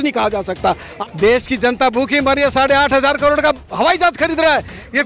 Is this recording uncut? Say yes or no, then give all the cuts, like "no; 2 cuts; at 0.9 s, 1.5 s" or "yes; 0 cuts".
no; 1 cut; at 0.9 s